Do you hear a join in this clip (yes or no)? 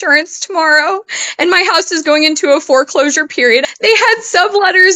yes